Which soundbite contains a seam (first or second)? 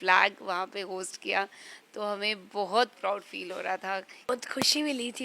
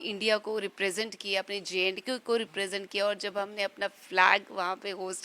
first